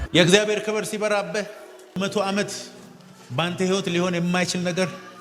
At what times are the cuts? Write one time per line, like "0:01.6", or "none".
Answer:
0:02.0